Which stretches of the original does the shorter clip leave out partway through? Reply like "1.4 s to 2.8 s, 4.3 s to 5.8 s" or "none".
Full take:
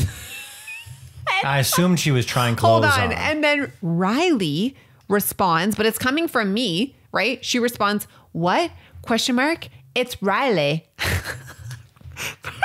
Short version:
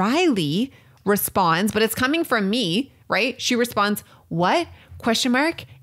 none